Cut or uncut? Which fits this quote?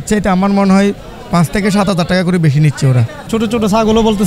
cut